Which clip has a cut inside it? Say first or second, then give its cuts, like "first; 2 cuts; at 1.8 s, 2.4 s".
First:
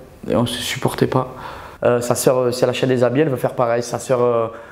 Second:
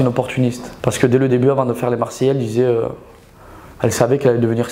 first; 1 cut; at 1.7 s